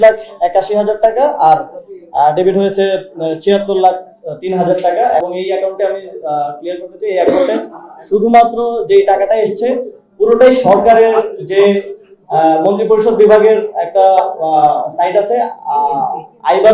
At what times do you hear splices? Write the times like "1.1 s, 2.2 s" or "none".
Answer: 5.2 s